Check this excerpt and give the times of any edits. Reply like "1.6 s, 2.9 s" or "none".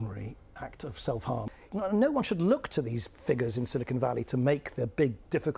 1.4 s